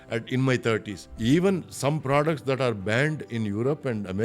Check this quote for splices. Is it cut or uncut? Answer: cut